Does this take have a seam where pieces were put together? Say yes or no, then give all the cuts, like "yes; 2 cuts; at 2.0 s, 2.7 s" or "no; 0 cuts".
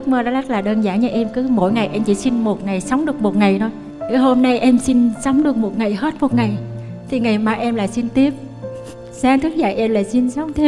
no; 0 cuts